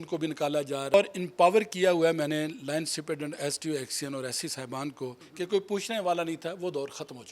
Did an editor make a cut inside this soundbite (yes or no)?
yes